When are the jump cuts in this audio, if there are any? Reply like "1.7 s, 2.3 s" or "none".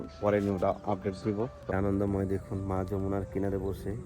1.7 s